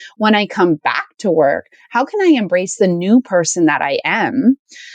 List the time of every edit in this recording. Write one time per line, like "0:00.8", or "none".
none